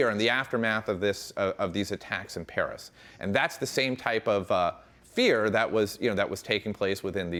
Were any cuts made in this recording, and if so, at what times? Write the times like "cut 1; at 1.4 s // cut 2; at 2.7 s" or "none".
none

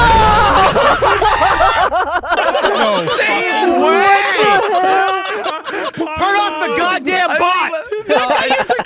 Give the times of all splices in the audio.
cut 1; at 5.9 s

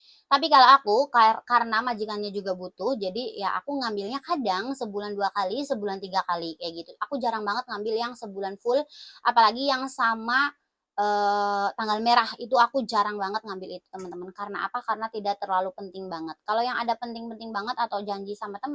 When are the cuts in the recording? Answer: none

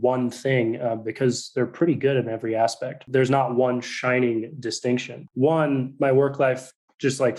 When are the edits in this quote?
cut 1; at 3.0 s // cut 2; at 5.2 s

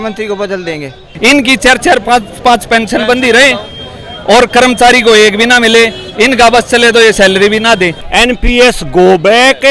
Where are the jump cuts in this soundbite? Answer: cut 1; at 1.1 s // cut 2; at 8.0 s

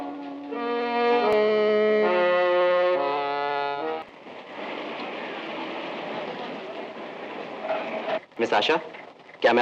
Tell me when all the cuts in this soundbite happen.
cut 1; at 4.0 s

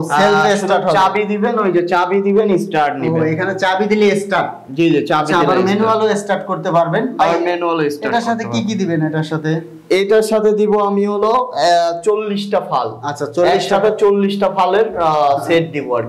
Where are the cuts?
none

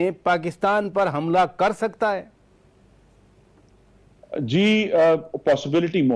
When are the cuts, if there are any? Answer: none

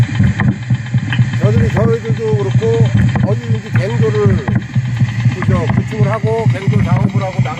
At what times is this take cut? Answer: none

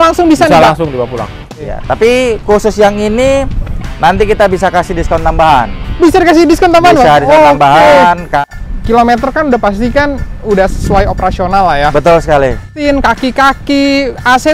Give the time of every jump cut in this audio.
cut 1; at 1.4 s // cut 2; at 8.4 s // cut 3; at 12.8 s

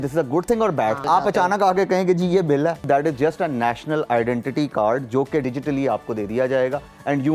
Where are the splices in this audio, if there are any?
cut 1; at 1.0 s // cut 2; at 2.8 s // cut 3; at 5.4 s

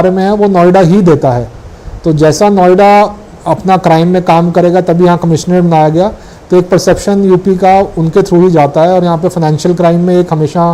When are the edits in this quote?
none

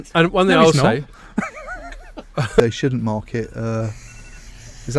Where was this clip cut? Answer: cut 1; at 2.6 s

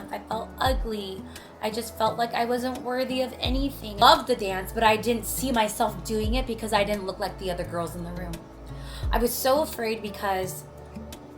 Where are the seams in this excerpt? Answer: cut 1; at 4.0 s

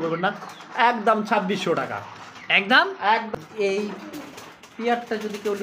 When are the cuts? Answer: cut 1; at 3.3 s

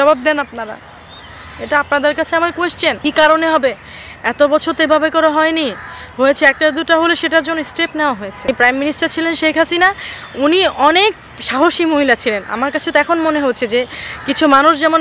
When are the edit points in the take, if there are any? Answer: cut 1; at 3.0 s // cut 2; at 8.5 s

